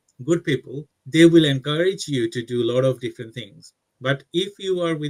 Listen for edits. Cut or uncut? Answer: uncut